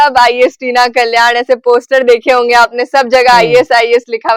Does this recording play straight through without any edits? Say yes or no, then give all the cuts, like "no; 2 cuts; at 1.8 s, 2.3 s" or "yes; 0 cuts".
yes; 0 cuts